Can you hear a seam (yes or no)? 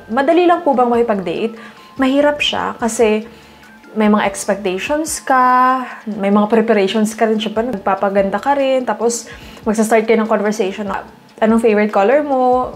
no